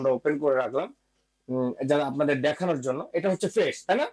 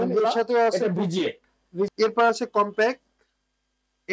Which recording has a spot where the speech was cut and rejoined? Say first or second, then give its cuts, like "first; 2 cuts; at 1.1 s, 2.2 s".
second; 1 cut; at 1.9 s